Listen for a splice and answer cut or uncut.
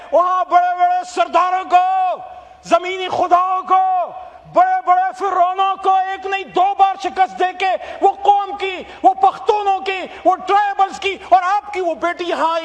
uncut